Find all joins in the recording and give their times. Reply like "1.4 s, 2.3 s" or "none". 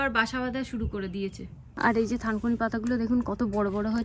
1.8 s